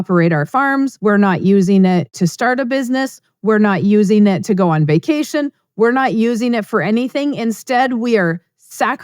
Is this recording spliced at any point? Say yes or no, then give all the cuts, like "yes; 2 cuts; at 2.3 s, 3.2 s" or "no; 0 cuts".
yes; 1 cut; at 1.0 s